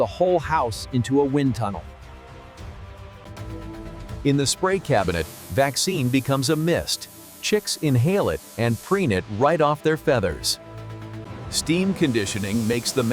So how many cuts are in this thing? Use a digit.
2